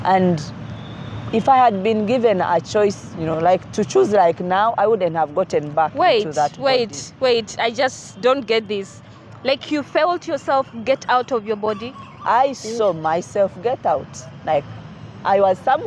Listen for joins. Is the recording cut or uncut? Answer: uncut